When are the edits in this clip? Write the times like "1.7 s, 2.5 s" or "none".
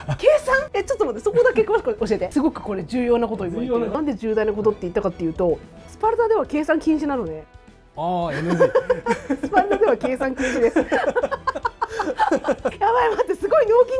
2.3 s, 3.5 s, 12.7 s